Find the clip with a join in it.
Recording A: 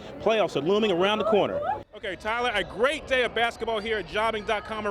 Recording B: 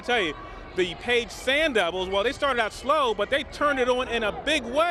A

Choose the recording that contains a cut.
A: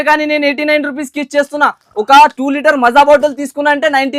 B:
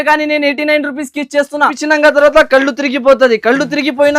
B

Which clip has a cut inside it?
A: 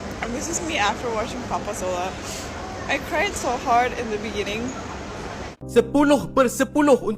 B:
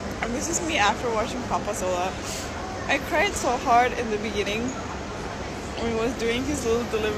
A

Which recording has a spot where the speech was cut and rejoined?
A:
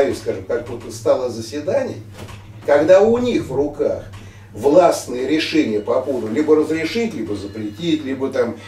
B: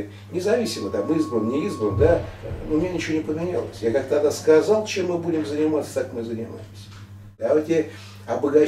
B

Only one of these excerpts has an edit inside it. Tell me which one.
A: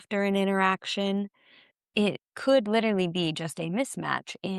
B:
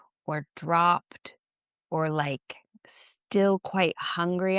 A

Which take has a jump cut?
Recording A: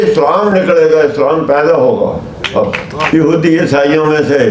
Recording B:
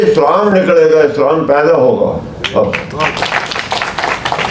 A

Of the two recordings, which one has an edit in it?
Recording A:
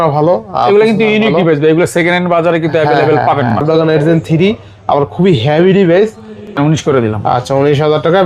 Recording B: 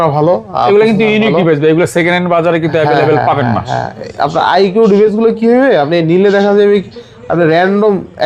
A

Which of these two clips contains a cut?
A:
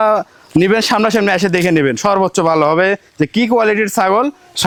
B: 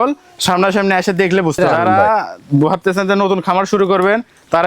B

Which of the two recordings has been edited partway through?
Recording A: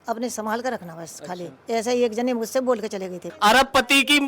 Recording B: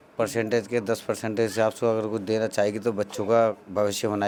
A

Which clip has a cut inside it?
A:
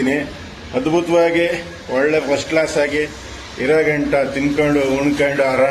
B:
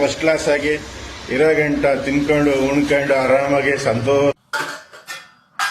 B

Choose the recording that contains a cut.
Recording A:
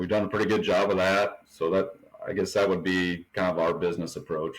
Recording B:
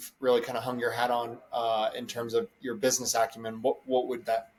A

